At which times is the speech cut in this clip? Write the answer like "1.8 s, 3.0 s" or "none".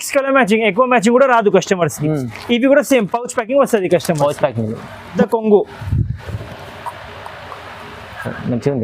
5.1 s